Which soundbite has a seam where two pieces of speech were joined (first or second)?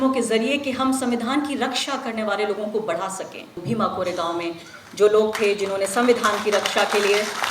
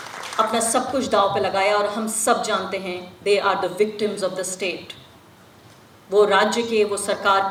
first